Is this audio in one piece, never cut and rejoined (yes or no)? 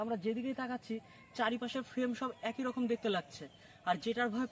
yes